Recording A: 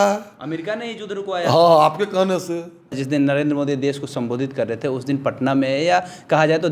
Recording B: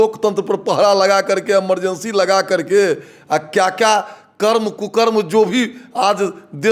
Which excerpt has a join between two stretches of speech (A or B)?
A